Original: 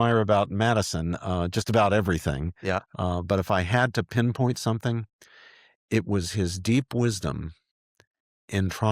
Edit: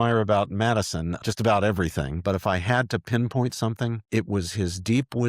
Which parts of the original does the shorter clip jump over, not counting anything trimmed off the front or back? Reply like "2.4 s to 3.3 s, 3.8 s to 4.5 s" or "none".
1.2 s to 1.5 s, 2.5 s to 3.2 s, 5.0 s to 5.8 s